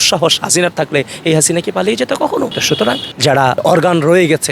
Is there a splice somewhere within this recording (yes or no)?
yes